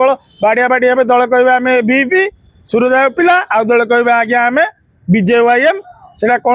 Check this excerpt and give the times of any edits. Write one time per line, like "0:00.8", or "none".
none